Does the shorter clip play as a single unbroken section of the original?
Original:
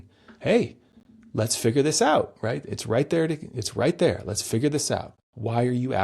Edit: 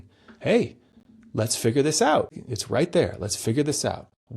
no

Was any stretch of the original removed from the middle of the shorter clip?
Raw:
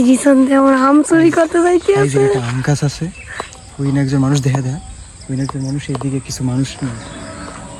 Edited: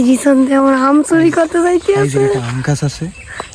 no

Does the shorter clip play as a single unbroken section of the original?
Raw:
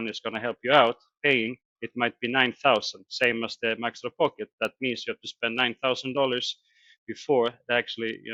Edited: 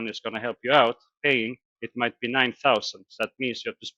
no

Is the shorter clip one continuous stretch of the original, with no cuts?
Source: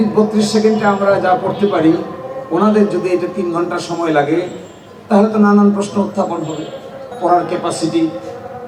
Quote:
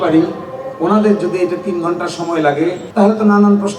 no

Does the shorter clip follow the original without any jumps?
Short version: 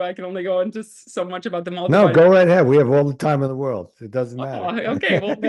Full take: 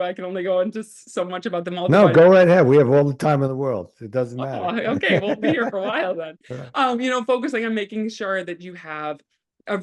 yes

